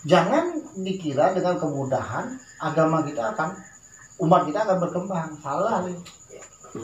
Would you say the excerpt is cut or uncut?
uncut